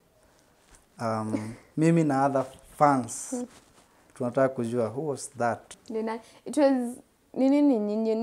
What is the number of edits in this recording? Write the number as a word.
one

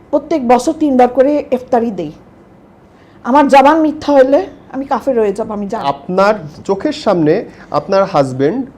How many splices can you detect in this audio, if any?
one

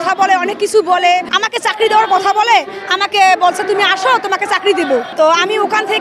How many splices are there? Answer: two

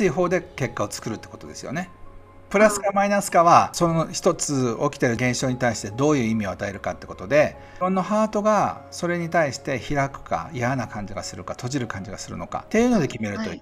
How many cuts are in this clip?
five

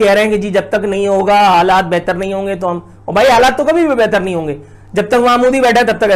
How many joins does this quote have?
zero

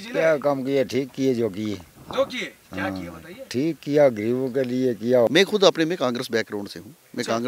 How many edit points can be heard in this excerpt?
one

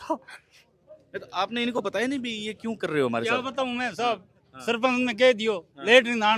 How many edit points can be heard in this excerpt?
zero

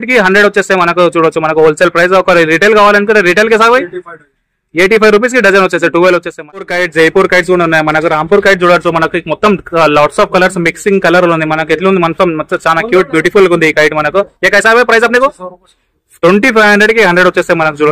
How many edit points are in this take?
one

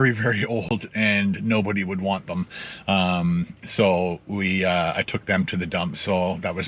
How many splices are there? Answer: zero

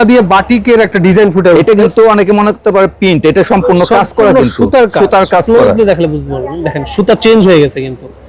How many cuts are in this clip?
zero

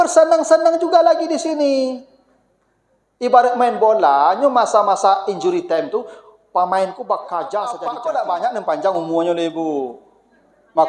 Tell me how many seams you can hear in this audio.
one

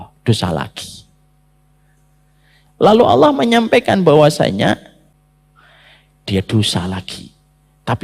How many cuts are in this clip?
one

